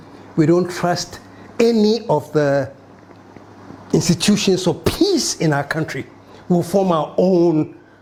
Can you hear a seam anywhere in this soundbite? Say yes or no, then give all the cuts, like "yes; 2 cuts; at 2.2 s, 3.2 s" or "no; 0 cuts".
no; 0 cuts